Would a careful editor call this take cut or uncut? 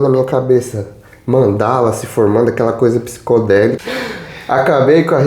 cut